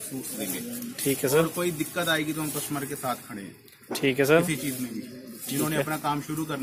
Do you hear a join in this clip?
no; 0 cuts

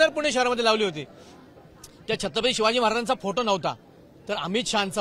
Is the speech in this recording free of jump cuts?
yes; 0 cuts

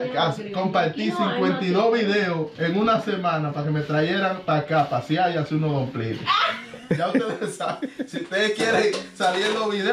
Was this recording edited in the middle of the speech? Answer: no; 0 cuts

